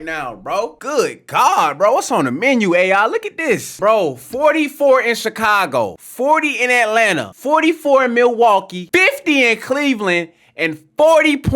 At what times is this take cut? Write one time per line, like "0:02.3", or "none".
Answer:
0:03.7
0:06.0
0:07.3
0:08.8